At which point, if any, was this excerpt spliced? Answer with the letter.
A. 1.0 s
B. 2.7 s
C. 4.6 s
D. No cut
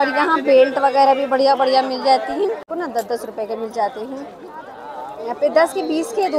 B